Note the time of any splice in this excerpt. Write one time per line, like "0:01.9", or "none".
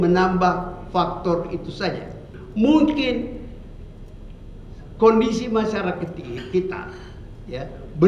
0:02.4